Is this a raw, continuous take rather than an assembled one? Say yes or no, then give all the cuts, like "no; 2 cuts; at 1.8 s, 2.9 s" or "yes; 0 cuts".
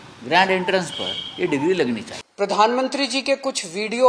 no; 1 cut; at 2.2 s